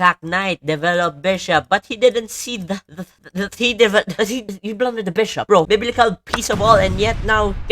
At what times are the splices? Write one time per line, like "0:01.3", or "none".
0:05.7